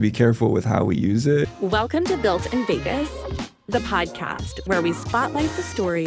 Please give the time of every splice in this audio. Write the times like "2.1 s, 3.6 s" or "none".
1.4 s